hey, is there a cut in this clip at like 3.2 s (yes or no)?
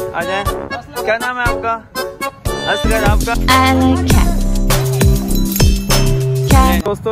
yes